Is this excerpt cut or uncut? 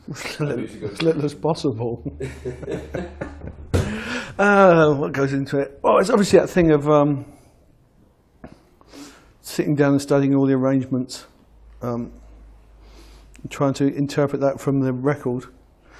cut